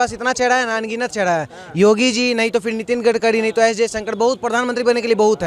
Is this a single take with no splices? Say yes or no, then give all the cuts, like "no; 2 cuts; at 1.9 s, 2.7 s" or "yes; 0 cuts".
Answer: yes; 0 cuts